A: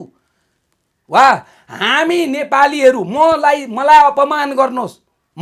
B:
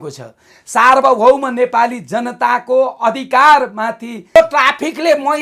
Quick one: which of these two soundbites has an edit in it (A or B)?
B